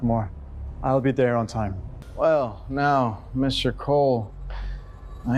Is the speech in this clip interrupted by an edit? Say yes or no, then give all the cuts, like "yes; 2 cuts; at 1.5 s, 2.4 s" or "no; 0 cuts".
yes; 1 cut; at 2.0 s